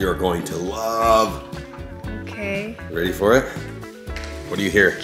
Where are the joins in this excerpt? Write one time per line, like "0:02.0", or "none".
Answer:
none